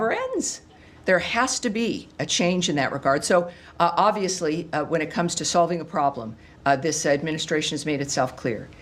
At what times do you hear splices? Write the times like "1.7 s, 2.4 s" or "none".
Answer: none